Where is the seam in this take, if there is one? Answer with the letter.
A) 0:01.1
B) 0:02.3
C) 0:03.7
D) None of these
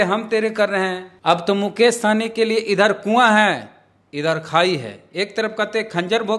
A